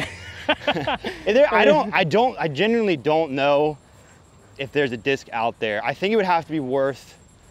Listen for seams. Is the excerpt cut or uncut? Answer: uncut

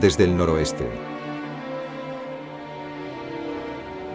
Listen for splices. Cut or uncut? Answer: cut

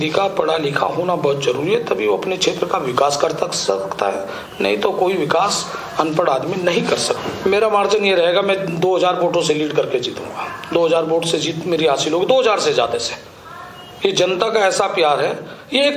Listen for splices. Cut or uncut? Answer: cut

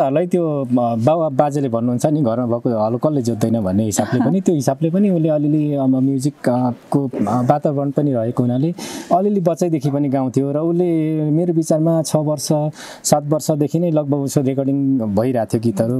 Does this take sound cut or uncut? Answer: uncut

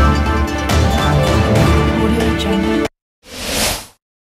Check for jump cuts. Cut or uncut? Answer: uncut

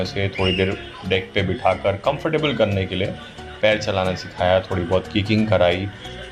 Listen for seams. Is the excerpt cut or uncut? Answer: uncut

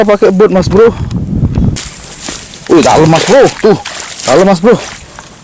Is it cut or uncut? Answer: cut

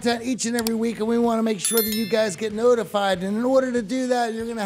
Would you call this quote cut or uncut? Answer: uncut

